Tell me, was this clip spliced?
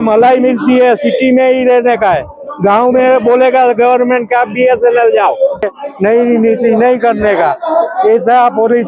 yes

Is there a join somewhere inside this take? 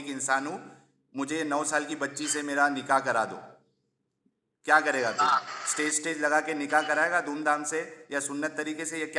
no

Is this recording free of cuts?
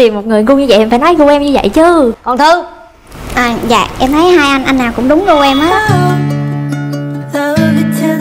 yes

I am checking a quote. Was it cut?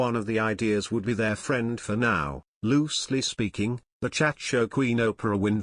yes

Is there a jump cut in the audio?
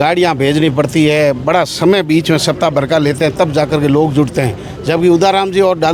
no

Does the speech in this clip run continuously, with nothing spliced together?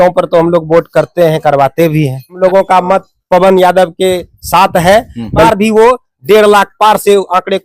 no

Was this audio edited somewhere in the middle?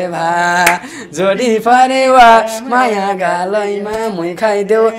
no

